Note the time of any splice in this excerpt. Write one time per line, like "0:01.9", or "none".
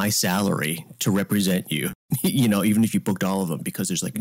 0:02.0